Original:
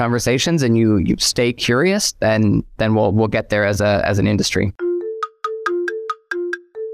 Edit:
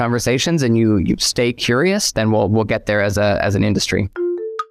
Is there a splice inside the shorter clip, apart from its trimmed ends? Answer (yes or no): yes